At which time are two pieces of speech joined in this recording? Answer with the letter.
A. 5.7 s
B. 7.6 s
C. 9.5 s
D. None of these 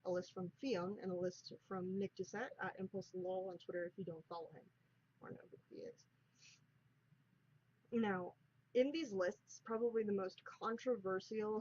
B